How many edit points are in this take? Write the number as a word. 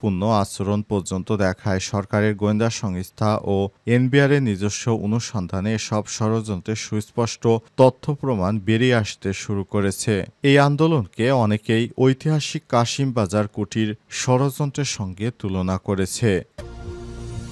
one